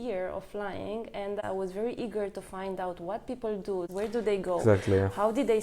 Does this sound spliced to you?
yes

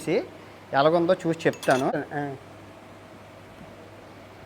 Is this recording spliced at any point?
yes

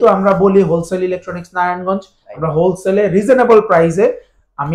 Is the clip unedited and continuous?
yes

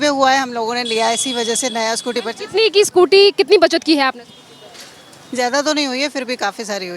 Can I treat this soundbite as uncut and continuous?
yes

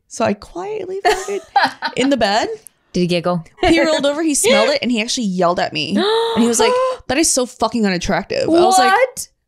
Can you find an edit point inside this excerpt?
yes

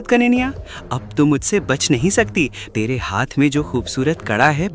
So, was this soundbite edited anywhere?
yes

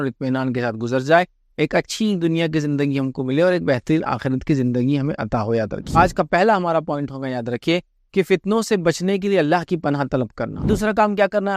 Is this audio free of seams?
no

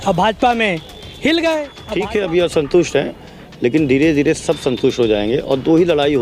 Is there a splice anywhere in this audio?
yes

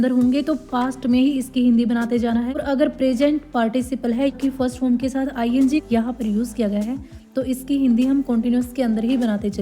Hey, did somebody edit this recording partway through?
yes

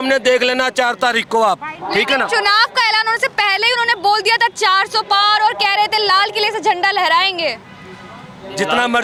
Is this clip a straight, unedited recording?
yes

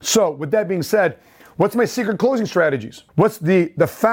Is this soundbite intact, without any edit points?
yes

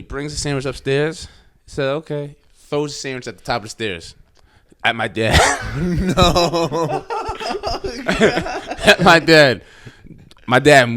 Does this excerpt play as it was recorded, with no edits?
yes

